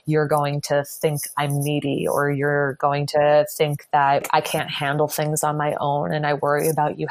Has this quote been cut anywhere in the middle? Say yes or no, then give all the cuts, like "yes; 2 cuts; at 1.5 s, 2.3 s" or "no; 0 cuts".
yes; 1 cut; at 4.3 s